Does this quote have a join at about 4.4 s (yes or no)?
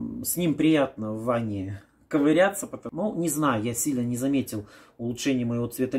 no